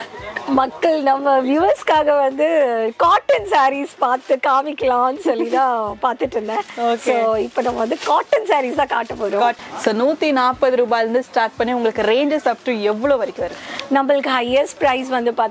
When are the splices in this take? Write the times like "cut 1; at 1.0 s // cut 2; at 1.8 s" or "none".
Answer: cut 1; at 9.6 s